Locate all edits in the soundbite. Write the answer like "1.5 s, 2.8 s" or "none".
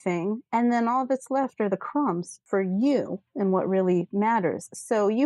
2.3 s